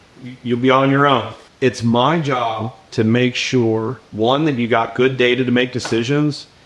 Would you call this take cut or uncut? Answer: cut